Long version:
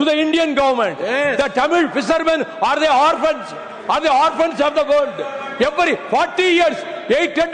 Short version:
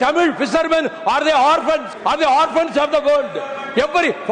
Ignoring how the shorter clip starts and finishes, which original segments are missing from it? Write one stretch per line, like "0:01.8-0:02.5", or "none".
0:03.5-0:03.7